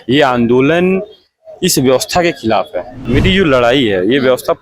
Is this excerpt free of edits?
no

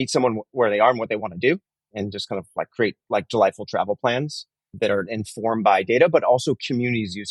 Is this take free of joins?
no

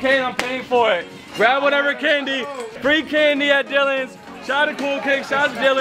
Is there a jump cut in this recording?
yes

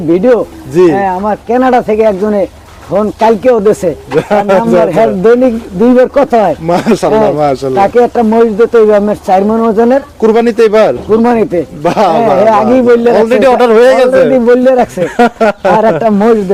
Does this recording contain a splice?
no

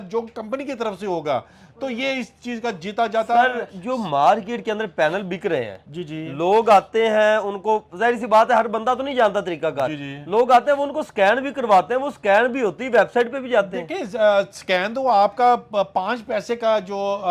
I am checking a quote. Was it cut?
no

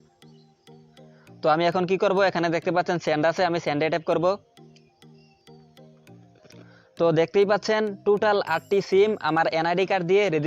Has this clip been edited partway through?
yes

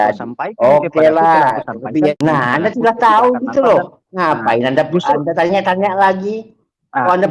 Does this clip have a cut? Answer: yes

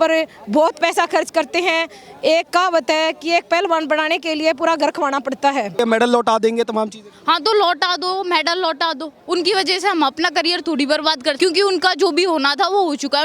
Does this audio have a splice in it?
yes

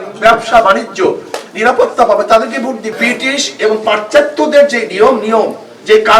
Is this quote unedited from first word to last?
no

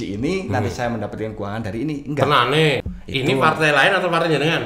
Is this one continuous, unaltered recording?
no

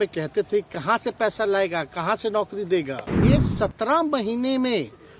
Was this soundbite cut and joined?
yes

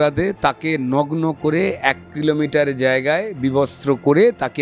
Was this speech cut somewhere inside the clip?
no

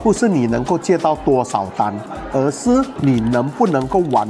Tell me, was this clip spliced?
no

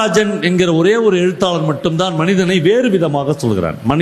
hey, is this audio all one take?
yes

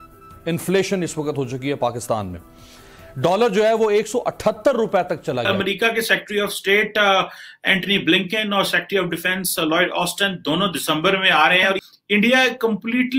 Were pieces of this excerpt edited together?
yes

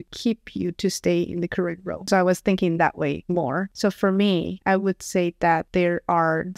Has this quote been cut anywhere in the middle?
yes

